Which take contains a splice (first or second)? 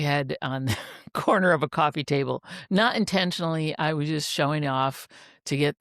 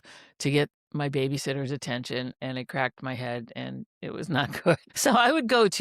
second